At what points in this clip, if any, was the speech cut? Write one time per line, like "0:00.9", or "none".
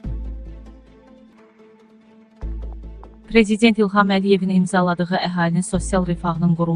0:01.3
0:03.1

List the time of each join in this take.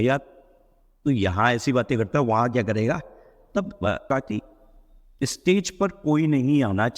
0:04.1

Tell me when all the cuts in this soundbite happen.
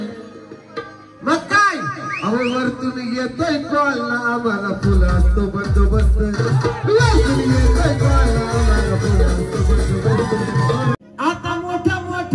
0:10.9

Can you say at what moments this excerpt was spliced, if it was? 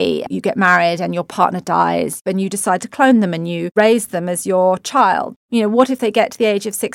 0:05.4

